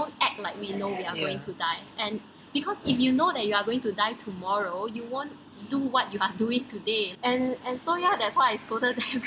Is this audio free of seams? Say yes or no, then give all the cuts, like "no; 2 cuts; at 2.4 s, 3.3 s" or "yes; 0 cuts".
yes; 0 cuts